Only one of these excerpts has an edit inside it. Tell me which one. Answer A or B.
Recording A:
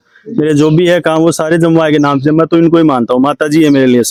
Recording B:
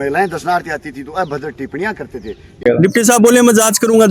B